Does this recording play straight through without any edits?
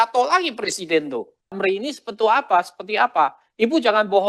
no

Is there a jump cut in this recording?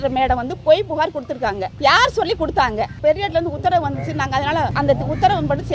yes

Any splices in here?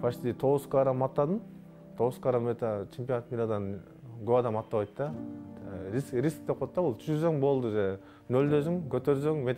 no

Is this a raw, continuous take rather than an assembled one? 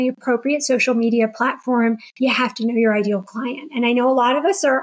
yes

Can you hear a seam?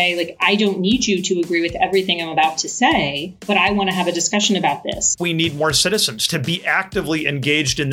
yes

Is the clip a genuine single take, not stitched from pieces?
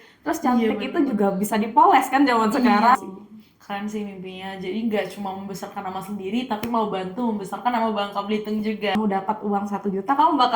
no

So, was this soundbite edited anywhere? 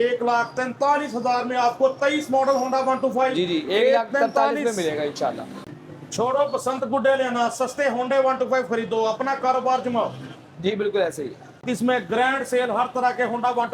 yes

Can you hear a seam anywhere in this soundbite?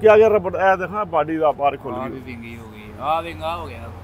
no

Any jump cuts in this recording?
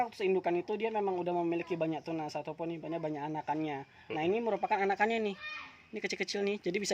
no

